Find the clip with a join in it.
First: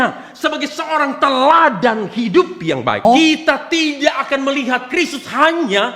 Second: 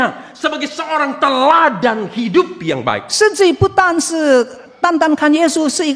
first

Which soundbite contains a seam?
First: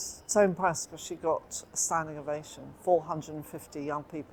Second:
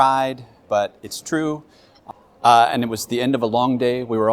second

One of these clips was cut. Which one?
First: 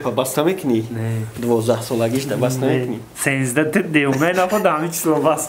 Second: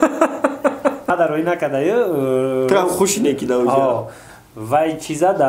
second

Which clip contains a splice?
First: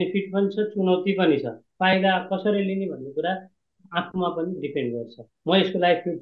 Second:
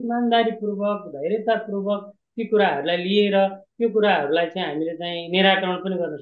first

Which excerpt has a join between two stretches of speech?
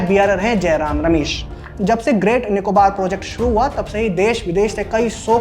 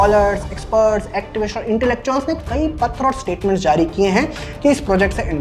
first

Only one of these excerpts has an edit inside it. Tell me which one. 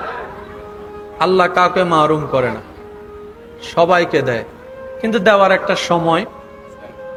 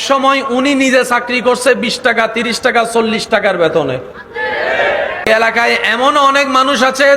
second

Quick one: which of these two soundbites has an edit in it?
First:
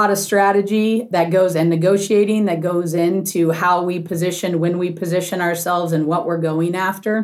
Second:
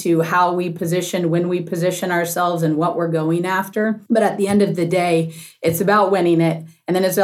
first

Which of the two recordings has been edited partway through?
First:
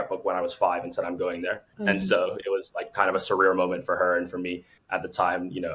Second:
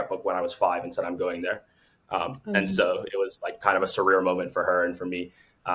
first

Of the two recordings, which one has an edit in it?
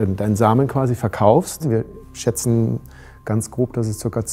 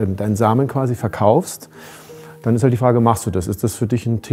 first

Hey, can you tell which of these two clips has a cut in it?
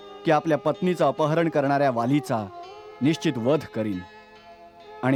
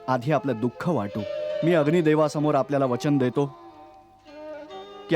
second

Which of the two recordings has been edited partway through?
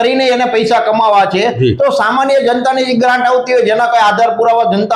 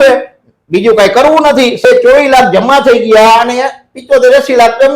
second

